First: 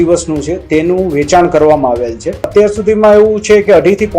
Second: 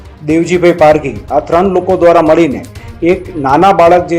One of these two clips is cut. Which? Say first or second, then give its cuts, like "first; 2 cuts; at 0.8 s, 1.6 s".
first; 1 cut; at 2.5 s